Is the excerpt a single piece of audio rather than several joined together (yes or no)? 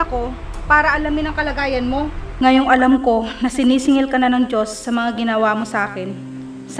no